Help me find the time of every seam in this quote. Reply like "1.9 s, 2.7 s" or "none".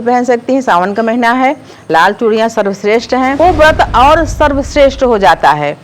3.4 s